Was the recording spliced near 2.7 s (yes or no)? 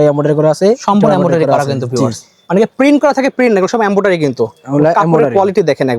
no